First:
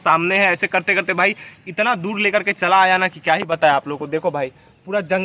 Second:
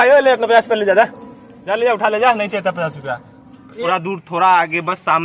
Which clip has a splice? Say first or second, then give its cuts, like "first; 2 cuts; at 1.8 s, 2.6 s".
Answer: second; 1 cut; at 3.8 s